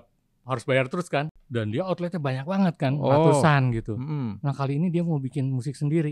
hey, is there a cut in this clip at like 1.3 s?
yes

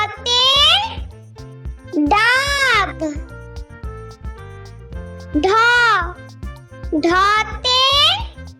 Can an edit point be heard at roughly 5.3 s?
yes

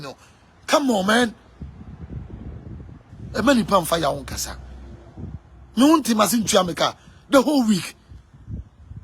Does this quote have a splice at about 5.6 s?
no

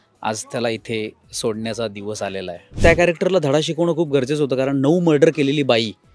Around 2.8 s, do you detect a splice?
yes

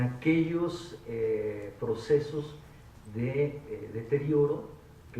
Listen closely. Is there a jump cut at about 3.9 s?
yes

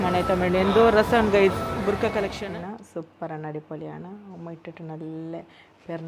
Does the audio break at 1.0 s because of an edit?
no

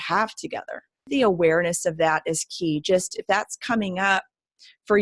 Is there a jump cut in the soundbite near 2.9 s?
no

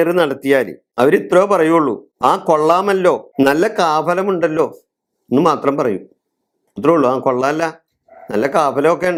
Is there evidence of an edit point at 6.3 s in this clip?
no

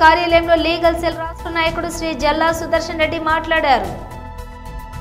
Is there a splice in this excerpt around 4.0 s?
yes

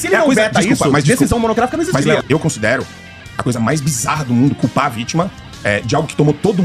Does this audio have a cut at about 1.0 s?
no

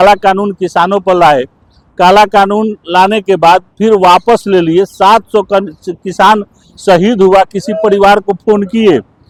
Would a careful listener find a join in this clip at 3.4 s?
no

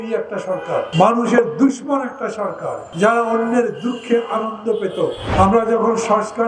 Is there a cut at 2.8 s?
yes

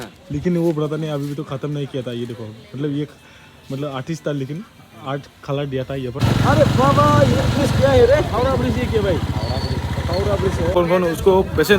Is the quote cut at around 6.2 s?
yes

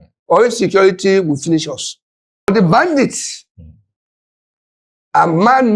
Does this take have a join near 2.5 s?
yes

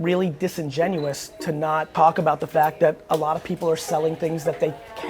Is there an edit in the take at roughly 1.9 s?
yes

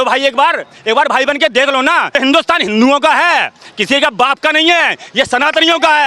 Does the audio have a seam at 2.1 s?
yes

